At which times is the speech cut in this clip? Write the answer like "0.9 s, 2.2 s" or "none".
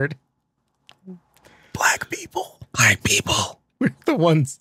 1.7 s, 3.6 s